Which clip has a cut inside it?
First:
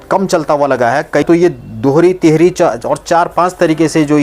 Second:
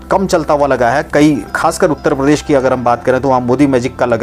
first; 1 cut; at 1.2 s

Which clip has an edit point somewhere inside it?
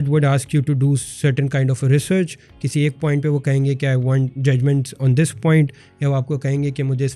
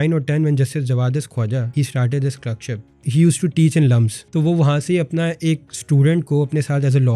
second; 3 cuts; at 1.7 s, 3.0 s, 4.2 s

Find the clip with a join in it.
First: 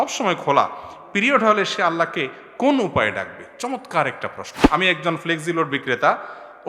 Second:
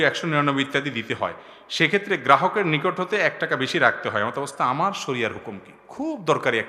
first; 1 cut; at 4.5 s

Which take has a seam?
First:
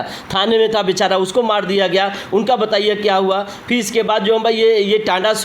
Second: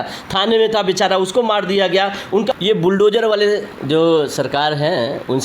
second; 1 cut; at 2.5 s

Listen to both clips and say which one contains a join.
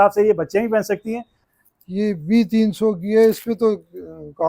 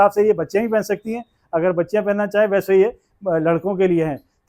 first; 1 cut; at 1.3 s

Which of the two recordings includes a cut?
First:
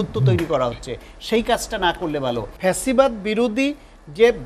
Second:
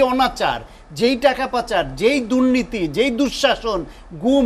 first; 1 cut; at 2.5 s

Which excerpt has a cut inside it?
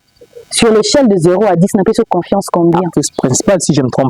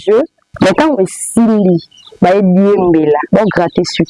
first; 1 cut; at 2.9 s

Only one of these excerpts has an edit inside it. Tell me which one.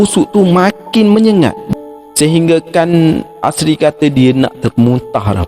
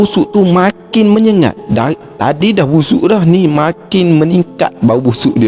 first; 1 cut; at 1.6 s

